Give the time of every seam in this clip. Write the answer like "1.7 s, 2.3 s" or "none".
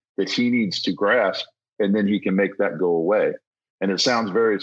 none